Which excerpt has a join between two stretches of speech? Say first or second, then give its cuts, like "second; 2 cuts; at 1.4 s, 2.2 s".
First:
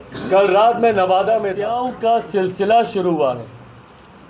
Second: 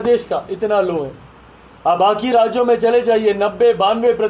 first; 1 cut; at 1.8 s